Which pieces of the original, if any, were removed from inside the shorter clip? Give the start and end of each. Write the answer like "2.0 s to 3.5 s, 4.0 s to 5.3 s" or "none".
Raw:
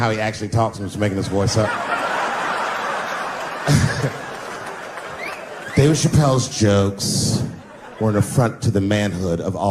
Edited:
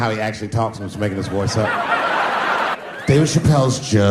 2.8 s to 5.5 s